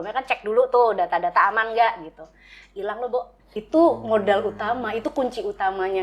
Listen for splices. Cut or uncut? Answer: cut